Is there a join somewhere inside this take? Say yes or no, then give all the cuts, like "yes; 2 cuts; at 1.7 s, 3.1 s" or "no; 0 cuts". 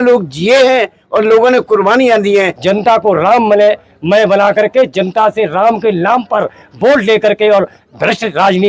yes; 1 cut; at 2.6 s